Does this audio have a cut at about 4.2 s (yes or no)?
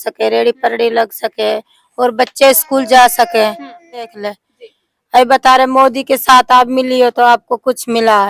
yes